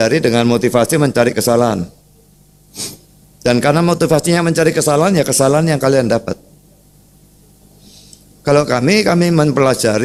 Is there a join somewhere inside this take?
no; 0 cuts

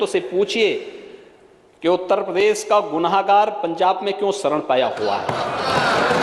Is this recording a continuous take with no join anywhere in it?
yes; 0 cuts

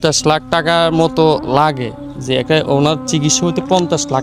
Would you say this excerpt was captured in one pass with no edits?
yes; 0 cuts

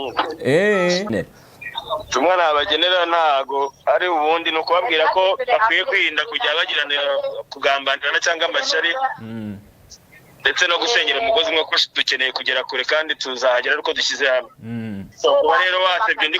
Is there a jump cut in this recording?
yes; 1 cut; at 1.1 s

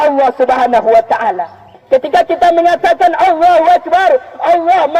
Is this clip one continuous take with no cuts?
no; 1 cut; at 1.7 s

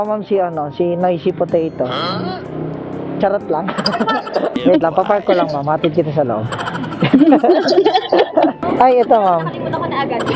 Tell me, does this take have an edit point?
yes; 2 cuts; at 4.6 s, 8.6 s

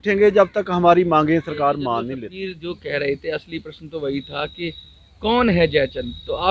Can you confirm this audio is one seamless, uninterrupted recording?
no; 1 cut; at 2.2 s

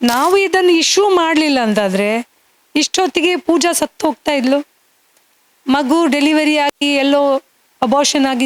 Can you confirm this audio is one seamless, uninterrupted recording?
yes; 0 cuts

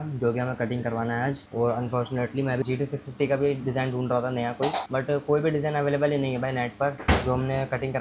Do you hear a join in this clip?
no; 0 cuts

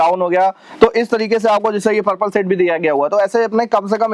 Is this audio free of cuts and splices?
yes; 0 cuts

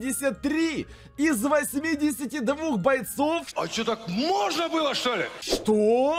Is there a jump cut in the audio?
no; 0 cuts

